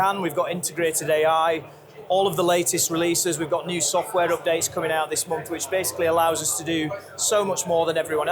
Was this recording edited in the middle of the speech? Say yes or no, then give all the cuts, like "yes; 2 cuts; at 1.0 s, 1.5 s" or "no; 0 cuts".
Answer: no; 0 cuts